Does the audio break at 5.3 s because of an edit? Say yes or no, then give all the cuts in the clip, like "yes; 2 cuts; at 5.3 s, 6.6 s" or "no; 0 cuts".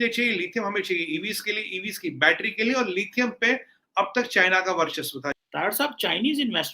yes; 1 cut; at 5.3 s